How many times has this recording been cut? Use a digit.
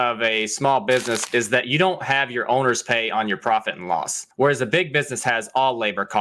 1